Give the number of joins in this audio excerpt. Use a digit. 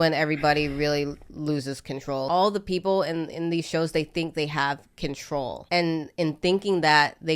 2